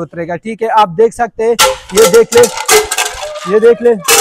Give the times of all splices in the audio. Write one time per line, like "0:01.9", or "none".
none